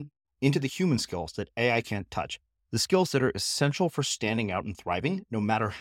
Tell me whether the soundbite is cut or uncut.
uncut